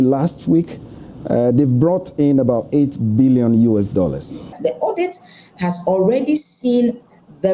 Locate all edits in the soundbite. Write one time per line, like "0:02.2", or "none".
0:04.5